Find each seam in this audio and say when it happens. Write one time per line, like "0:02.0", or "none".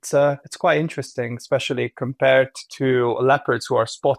none